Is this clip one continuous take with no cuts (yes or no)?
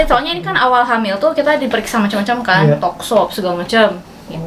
yes